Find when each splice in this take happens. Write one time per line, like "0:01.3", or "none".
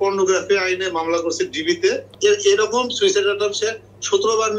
0:02.1